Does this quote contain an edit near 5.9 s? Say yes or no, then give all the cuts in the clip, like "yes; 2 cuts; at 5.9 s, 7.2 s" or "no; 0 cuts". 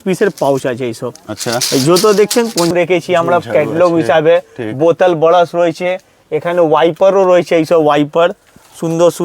no; 1 cut; at 2.7 s